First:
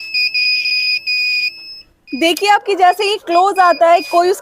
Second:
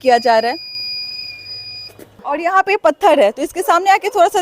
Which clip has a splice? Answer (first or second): second